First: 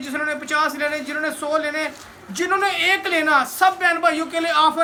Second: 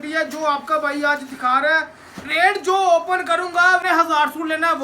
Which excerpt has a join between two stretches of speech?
second; 1 cut; at 3.8 s

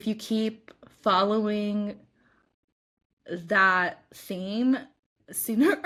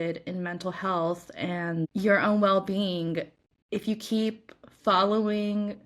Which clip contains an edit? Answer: second; 1 cut; at 1.9 s

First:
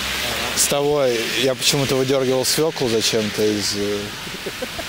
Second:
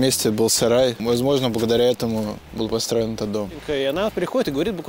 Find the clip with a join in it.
second; 3 cuts; at 1.0 s, 2.4 s, 3.6 s

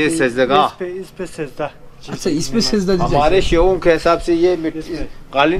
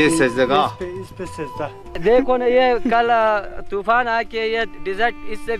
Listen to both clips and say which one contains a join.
second; 1 cut; at 1.9 s

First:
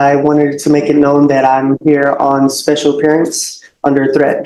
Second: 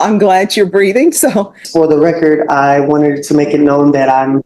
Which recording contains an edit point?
second; 1 cut; at 1.6 s

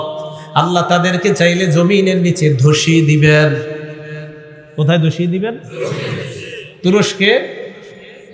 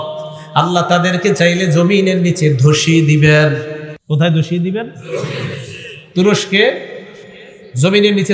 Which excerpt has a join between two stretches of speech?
second; 1 cut; at 3.9 s

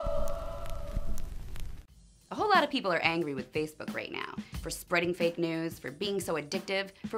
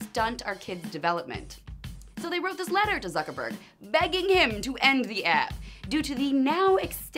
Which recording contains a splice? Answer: second; 1 cut; at 2.2 s

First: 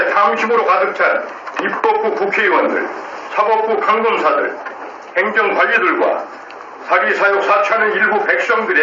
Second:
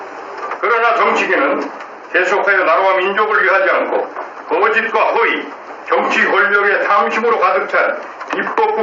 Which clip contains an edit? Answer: first; 1 cut; at 6.4 s

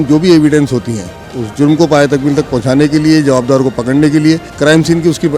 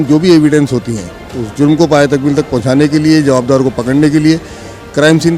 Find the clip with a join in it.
first; 1 cut; at 4.5 s

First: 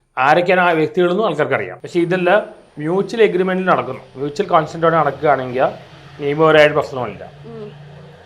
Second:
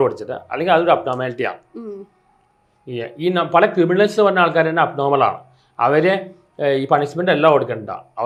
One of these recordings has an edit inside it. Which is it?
first; 1 cut; at 1.8 s

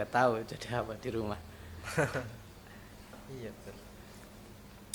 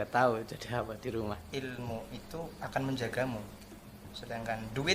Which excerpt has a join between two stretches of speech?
second; 1 cut; at 1.4 s

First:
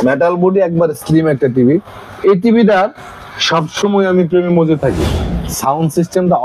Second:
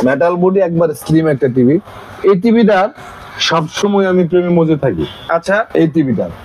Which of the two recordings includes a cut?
first; 1 cut; at 5.3 s

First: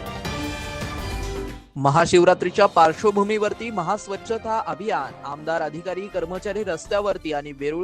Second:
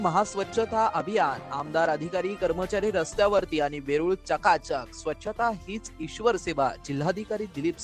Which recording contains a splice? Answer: first; 1 cut; at 1.4 s

